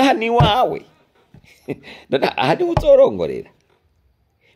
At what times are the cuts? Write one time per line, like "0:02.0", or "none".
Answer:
none